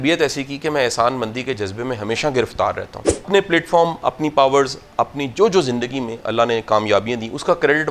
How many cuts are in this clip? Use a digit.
1